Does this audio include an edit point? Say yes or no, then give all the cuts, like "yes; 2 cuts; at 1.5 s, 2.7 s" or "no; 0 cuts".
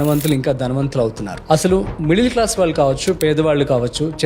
yes; 1 cut; at 1.5 s